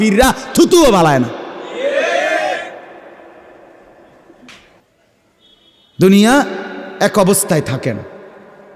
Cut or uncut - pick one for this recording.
cut